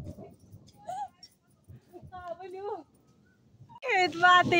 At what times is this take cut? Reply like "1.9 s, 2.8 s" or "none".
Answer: 3.6 s